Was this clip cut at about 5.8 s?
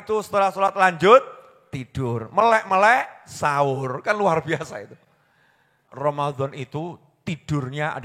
yes; 1 cut; at 5.8 s

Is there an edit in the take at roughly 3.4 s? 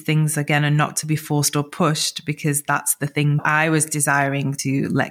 yes; 1 cut; at 3.4 s

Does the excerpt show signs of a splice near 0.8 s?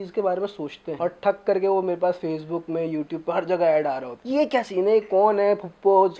yes; 2 cuts; at 0.8 s, 4.1 s

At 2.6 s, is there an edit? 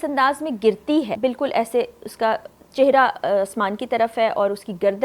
no; 1 cut; at 1.1 s

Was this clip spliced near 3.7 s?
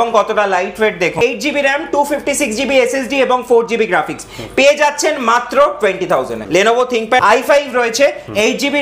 no; 3 cuts; at 1.2 s, 6.4 s, 7.2 s

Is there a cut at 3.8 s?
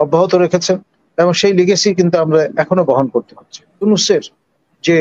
yes; 1 cut; at 3.8 s

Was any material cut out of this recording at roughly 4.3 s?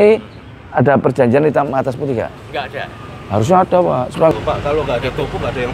yes; 1 cut; at 4.3 s

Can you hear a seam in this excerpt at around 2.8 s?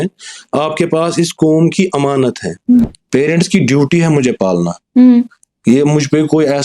yes; 1 cut; at 2.8 s

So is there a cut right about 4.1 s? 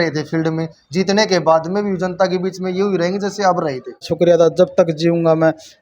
yes; 1 cut; at 4.1 s

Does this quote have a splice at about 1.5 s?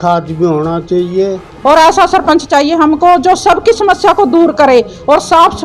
yes; 1 cut; at 1.5 s

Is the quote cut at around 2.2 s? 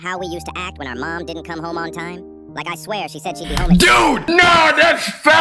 no; 0 cuts

